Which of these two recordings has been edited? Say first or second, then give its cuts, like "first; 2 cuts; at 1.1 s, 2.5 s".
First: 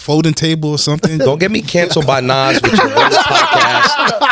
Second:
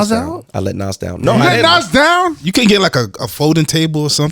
second; 1 cut; at 2.4 s